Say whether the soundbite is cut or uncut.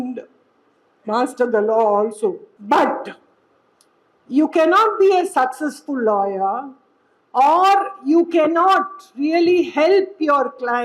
cut